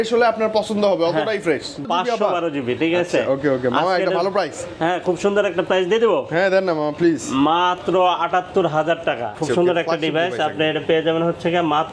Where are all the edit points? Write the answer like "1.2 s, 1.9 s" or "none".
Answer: 1.9 s, 9.4 s